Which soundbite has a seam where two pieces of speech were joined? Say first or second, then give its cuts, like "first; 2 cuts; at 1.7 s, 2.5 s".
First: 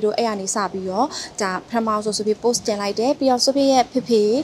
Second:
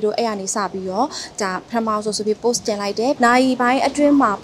second; 1 cut; at 3.2 s